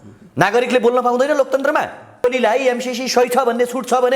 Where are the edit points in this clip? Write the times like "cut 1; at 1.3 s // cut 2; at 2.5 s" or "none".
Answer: cut 1; at 2.2 s